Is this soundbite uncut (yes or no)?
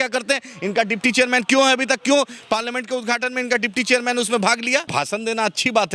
no